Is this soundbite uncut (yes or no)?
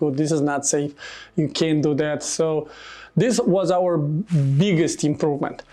yes